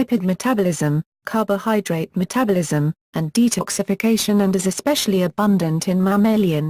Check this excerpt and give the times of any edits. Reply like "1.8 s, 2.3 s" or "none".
2.7 s